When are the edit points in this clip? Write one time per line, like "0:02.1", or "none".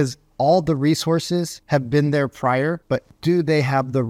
0:01.6
0:03.1

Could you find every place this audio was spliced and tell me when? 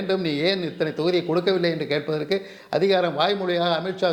none

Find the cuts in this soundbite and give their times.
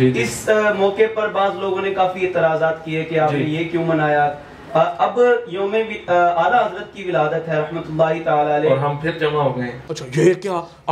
0:09.7

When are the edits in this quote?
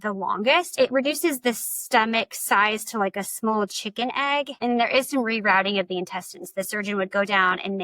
0:00.7
0:04.5

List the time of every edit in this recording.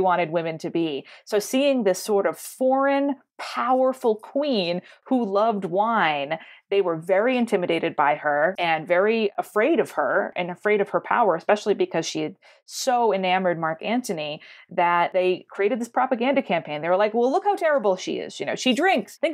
none

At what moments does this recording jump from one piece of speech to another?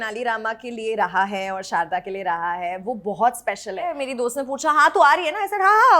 0:04.0

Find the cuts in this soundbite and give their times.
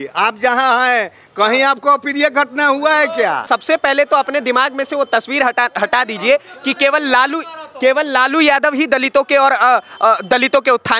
0:03.4

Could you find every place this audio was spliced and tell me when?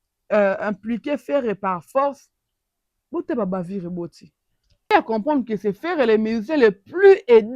0:04.8

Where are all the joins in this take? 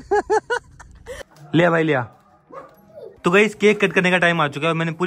0:01.1
0:03.2

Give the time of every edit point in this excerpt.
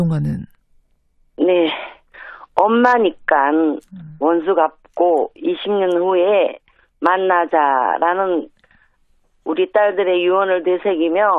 0:01.9

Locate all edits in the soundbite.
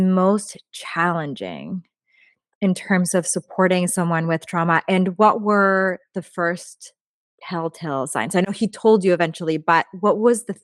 none

